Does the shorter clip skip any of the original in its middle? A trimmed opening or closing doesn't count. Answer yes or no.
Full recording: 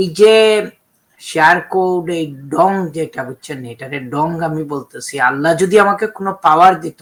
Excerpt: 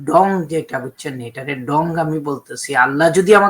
no